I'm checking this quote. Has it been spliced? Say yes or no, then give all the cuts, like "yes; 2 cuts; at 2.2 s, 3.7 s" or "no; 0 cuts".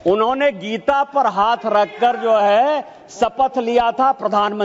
no; 0 cuts